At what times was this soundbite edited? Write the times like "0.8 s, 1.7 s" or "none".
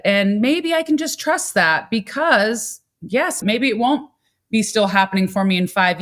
3.4 s